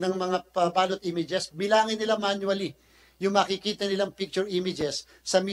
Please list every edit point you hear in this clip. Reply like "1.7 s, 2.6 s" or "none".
none